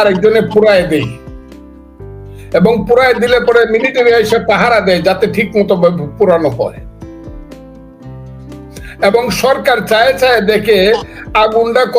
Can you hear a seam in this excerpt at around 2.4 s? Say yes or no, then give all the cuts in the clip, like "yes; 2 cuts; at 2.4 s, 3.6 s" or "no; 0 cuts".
yes; 2 cuts; at 1.1 s, 2.4 s